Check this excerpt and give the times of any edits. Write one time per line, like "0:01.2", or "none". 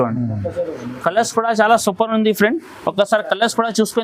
none